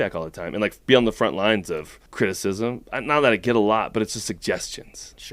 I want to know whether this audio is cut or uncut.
cut